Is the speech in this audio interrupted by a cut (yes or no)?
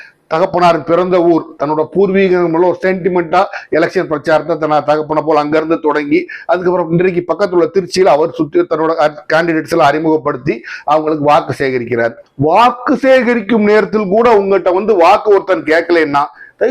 yes